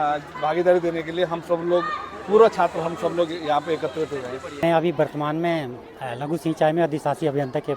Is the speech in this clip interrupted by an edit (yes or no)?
yes